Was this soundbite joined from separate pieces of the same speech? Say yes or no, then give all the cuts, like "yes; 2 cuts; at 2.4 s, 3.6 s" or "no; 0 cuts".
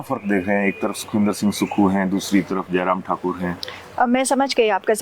no; 0 cuts